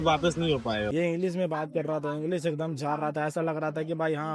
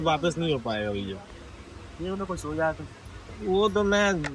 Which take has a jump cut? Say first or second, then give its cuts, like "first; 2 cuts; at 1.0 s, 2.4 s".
first; 1 cut; at 0.9 s